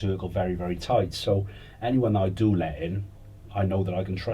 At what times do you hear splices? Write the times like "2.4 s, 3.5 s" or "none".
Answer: none